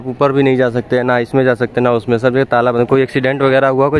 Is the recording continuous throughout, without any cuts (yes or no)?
yes